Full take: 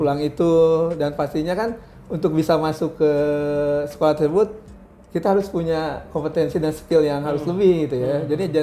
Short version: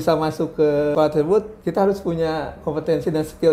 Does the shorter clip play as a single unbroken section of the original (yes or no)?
no